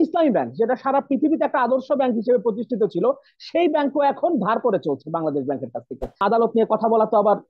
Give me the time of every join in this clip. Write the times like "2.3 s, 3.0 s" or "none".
6.2 s